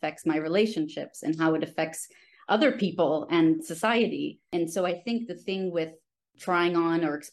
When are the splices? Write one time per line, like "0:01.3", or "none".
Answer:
0:04.5
0:06.3